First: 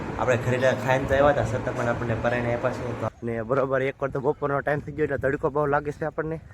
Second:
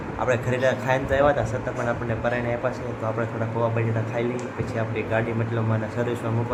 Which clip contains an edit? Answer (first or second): first